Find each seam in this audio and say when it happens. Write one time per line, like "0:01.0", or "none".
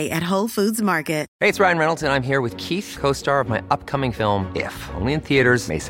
0:01.3